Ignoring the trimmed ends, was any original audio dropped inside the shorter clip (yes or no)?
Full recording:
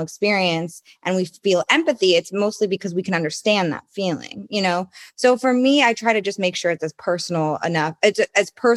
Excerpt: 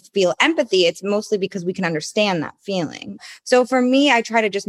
yes